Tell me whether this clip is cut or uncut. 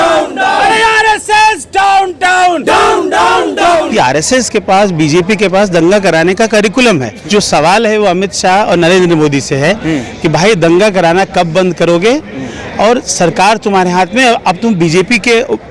cut